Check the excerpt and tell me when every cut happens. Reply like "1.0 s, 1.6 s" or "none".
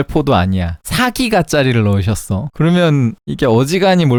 none